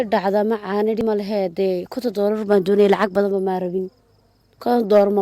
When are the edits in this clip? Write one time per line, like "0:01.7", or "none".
0:01.0